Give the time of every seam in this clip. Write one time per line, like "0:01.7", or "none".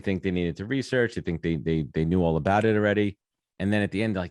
none

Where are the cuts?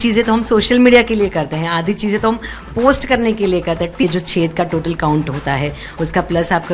0:04.0

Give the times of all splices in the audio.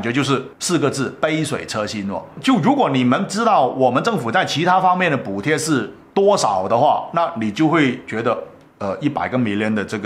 none

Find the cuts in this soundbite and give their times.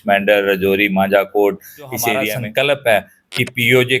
0:02.3

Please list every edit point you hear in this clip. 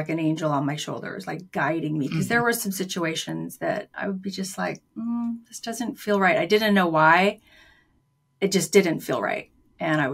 none

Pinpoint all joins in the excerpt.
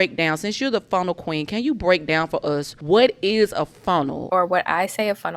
0:02.7
0:04.2

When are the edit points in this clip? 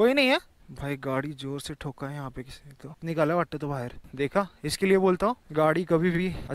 0:04.0

